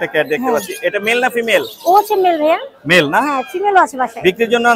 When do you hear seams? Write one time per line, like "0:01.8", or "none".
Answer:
none